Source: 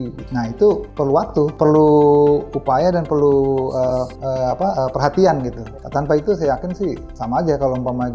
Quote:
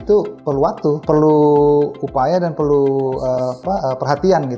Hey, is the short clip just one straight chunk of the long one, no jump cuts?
no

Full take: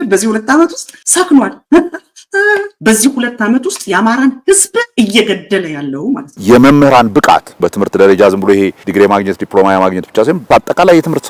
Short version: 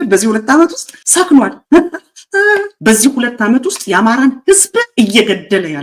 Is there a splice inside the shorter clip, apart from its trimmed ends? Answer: no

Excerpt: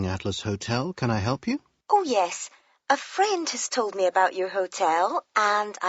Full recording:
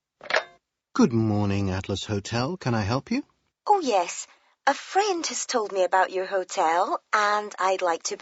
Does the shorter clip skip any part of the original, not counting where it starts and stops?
yes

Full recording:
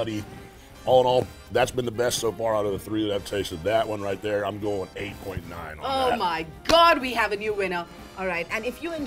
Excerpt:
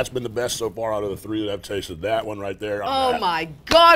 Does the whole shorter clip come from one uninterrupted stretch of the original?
no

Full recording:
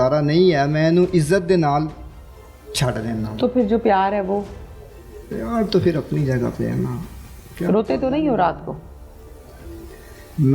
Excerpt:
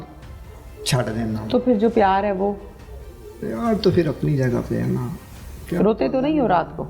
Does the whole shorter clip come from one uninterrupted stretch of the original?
yes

